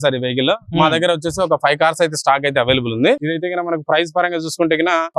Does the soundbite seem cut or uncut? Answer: cut